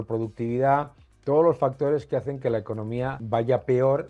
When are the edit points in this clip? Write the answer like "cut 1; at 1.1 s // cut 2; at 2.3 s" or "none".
cut 1; at 3.2 s